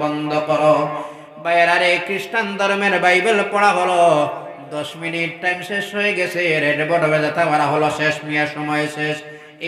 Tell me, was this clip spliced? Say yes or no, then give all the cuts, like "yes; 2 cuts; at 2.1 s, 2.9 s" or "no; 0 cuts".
no; 0 cuts